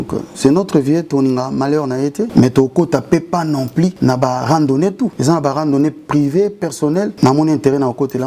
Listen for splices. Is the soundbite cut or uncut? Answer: cut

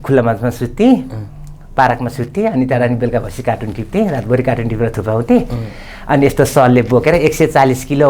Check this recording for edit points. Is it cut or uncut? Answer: uncut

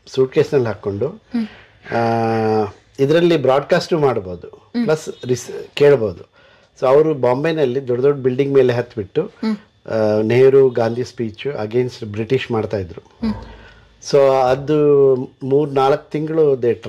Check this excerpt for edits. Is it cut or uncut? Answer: uncut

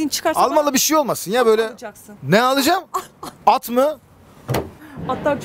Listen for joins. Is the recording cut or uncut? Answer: uncut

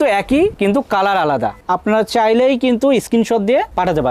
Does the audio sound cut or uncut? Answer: uncut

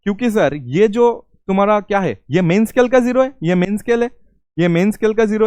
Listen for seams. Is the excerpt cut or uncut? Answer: uncut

